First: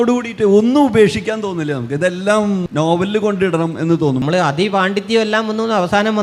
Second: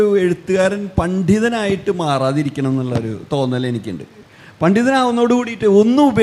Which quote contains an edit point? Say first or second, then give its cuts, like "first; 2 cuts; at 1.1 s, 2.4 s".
first; 2 cuts; at 2.7 s, 4.2 s